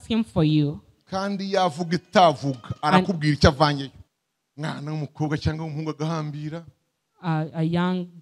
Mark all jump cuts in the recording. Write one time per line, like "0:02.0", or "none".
0:03.9